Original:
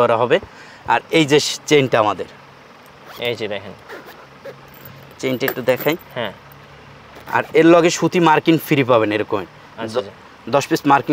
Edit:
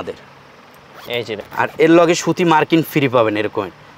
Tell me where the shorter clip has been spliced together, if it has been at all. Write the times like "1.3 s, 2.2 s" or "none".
1.4 s